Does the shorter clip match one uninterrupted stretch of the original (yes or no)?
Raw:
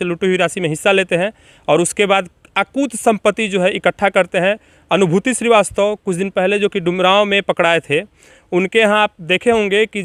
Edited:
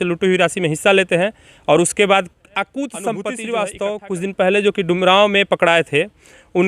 no